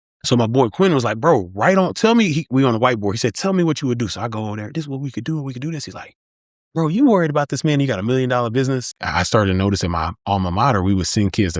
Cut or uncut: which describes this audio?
cut